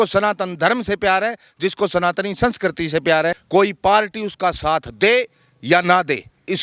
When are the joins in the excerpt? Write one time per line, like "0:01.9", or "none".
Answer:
0:03.4